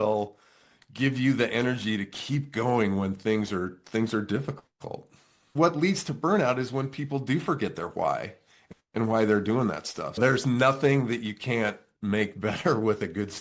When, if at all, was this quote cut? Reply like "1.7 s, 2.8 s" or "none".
5.5 s, 10.2 s